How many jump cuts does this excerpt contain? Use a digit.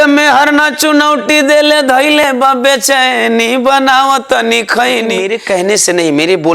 1